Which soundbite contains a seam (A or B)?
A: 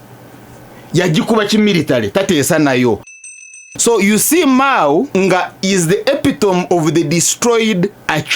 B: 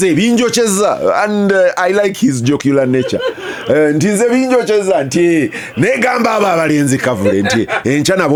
A